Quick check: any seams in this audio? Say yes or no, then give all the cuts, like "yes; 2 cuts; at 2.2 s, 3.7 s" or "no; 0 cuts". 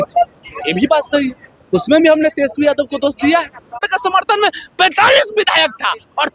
yes; 1 cut; at 3.9 s